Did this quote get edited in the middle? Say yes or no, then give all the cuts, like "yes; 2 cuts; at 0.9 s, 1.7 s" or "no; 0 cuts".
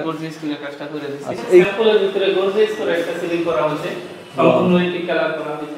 yes; 1 cut; at 1.6 s